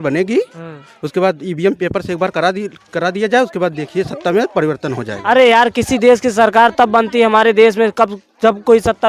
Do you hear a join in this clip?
no; 0 cuts

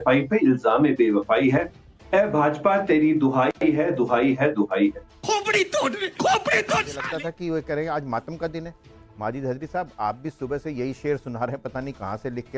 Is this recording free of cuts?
no; 1 cut; at 7.0 s

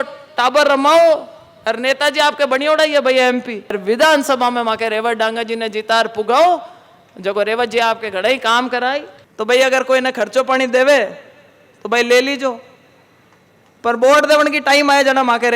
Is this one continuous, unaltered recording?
no; 2 cuts; at 3.8 s, 9.2 s

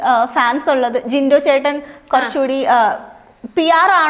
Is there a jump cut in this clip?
no; 0 cuts

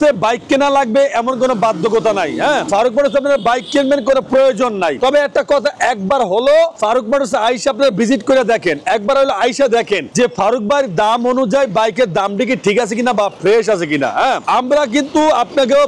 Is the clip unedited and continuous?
yes; 0 cuts

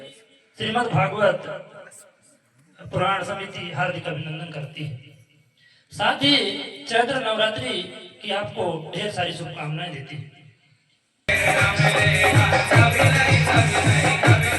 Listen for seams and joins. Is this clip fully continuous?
no; 1 cut; at 11.3 s

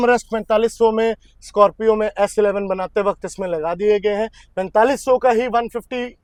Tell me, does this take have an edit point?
no; 0 cuts

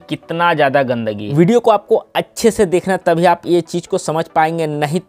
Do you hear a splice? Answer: yes; 1 cut; at 1.2 s

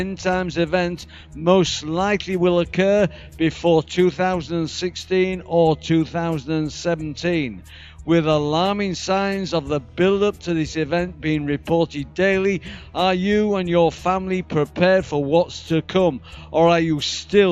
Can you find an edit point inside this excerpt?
no; 0 cuts

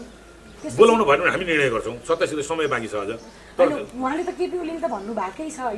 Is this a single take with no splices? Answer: yes; 0 cuts

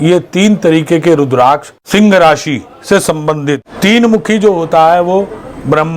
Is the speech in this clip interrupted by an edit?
yes; 1 cut; at 3.6 s

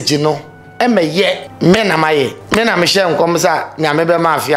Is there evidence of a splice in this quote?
yes; 2 cuts; at 1.5 s, 2.4 s

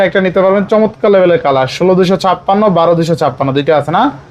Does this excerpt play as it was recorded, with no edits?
yes; 0 cuts

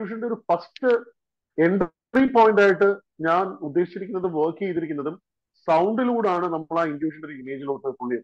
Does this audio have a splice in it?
no; 0 cuts

